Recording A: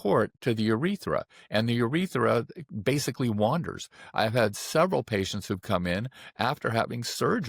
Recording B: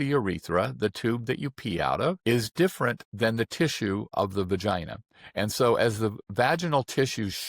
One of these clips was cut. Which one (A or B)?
B